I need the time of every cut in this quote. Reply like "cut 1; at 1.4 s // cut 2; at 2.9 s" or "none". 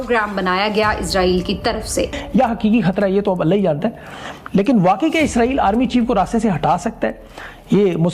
none